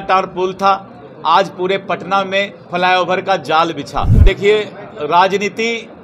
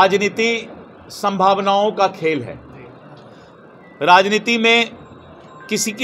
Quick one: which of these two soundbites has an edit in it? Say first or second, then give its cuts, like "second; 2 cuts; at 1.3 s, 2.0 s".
first; 1 cut; at 4.1 s